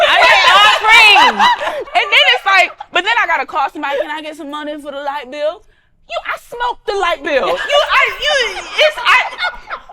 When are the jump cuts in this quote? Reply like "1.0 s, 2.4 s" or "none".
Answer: 1.7 s

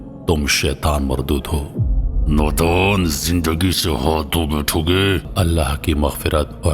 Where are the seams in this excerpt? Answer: 5.3 s

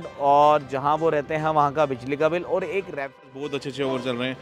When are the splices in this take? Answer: 3.4 s

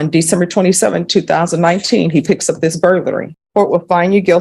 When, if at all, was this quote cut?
3.4 s

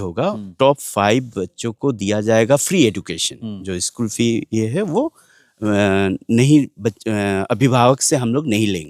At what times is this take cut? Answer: none

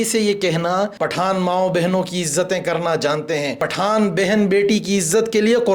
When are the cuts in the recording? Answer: 1.0 s, 3.6 s

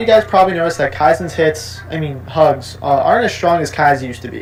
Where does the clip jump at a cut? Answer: none

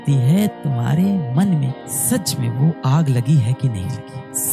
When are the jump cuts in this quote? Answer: none

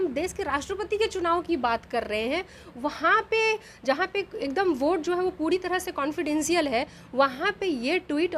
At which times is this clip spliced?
none

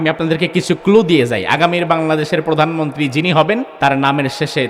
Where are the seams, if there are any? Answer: 3.7 s

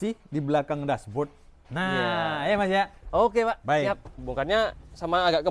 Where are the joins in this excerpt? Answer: 4.2 s

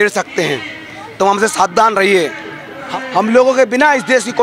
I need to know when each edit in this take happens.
2.7 s

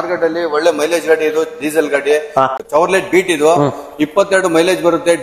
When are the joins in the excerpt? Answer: none

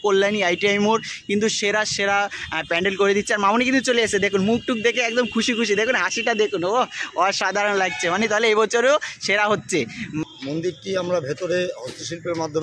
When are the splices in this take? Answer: 10.2 s

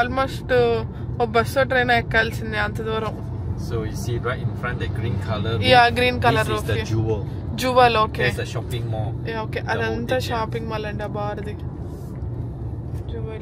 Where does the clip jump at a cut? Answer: none

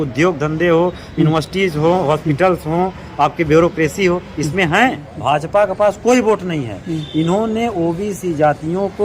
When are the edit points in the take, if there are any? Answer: 5.1 s

